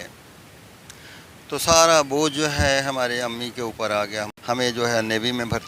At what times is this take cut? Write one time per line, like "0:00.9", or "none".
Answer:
0:04.3